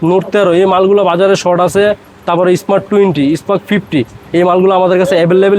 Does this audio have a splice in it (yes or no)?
no